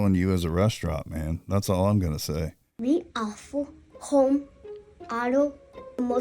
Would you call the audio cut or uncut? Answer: cut